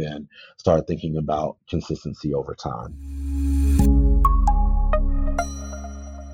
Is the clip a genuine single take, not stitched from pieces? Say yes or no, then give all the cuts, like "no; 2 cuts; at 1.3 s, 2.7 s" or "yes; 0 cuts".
no; 1 cut; at 2.9 s